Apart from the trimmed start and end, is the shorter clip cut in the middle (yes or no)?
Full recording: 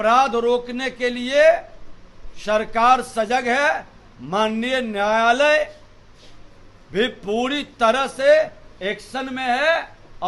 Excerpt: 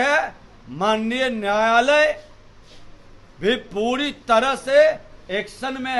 no